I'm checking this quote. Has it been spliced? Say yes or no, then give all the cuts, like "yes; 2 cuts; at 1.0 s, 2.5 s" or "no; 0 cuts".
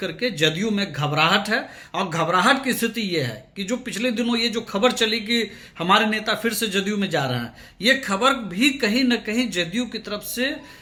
no; 0 cuts